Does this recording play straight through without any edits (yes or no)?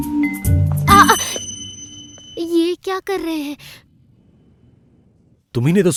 yes